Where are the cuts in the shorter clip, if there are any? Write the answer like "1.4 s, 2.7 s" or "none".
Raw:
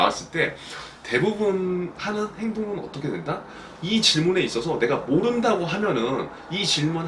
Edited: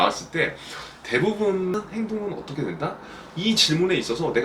1.7 s